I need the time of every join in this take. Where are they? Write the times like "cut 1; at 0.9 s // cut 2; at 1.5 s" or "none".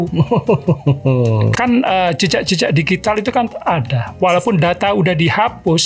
cut 1; at 1.5 s